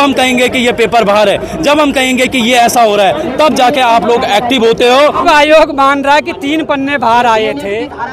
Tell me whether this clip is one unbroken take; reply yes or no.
no